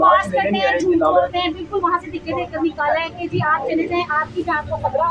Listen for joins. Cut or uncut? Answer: uncut